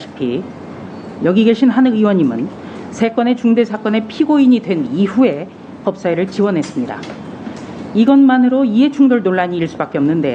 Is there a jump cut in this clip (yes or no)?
no